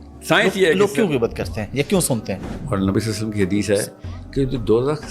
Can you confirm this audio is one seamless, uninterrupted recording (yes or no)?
no